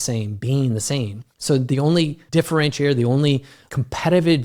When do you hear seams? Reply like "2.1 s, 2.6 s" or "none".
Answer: 1.2 s, 2.2 s, 3.6 s